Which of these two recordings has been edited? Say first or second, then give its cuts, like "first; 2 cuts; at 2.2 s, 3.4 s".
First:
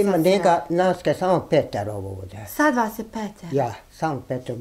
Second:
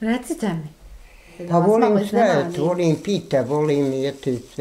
second; 1 cut; at 1.3 s